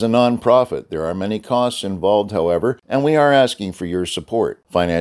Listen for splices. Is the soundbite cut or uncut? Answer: cut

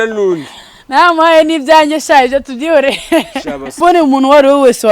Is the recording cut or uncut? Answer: cut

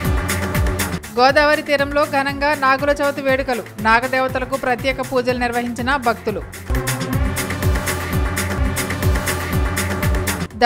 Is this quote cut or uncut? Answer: cut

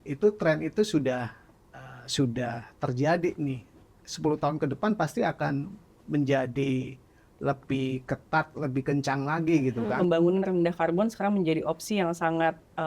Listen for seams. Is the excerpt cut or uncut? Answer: cut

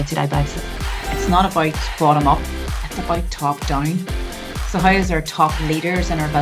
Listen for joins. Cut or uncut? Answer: cut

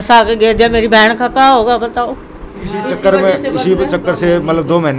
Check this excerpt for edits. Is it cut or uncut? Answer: cut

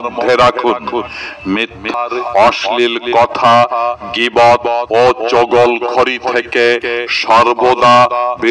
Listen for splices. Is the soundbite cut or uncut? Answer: cut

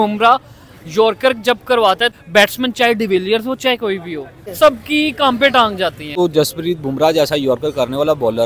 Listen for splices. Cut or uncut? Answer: cut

